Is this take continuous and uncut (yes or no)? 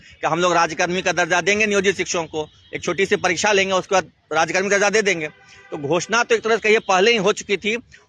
yes